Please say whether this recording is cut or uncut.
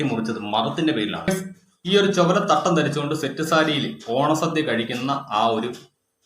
cut